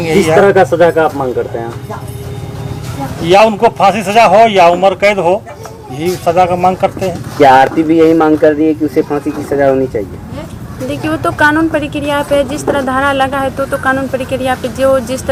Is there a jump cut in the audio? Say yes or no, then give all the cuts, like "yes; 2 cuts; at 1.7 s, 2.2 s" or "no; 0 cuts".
no; 0 cuts